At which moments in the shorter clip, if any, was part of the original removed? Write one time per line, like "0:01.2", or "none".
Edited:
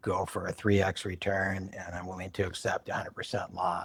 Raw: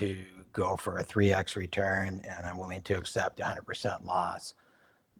none